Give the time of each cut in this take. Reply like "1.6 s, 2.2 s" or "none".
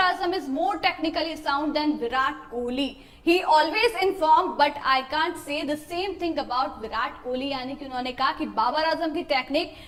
none